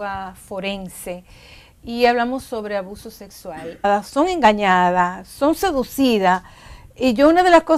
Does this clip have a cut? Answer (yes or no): no